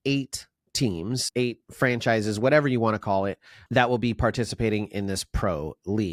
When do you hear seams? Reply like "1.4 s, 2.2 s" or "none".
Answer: none